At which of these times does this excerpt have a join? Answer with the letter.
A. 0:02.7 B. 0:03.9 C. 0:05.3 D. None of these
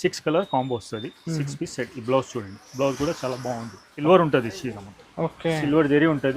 B